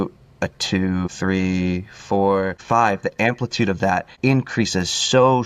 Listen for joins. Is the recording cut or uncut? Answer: cut